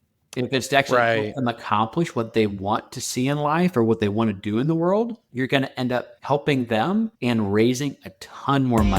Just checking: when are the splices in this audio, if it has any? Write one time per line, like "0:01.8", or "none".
0:05.2
0:06.1
0:07.2